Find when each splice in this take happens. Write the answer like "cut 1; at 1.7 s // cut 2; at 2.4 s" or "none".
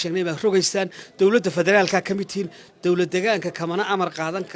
cut 1; at 2.6 s

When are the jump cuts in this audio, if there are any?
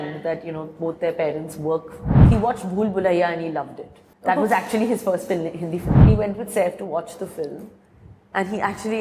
cut 1; at 2.1 s // cut 2; at 6.0 s

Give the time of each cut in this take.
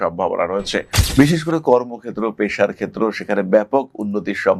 none

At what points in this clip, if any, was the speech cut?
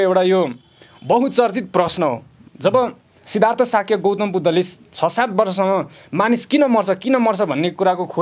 cut 1; at 2.4 s

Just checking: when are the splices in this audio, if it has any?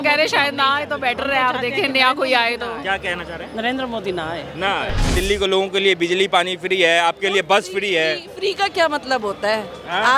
cut 1; at 5.1 s

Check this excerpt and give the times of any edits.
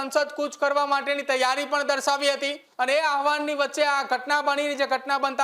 cut 1; at 2.6 s

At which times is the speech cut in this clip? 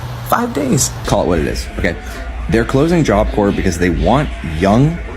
cut 1; at 1.0 s

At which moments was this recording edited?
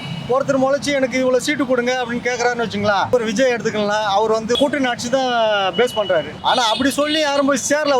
cut 1; at 3.1 s // cut 2; at 4.6 s // cut 3; at 6.3 s

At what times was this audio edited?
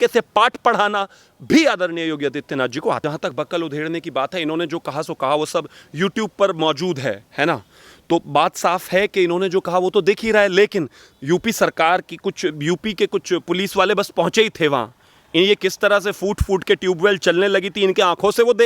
cut 1; at 3.0 s

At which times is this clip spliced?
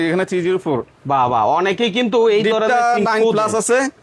none

